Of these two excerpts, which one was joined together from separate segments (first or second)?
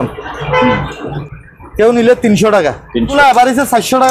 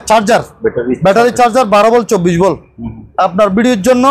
first